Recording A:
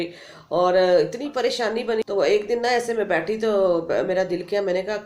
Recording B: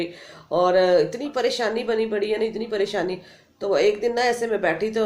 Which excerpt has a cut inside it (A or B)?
A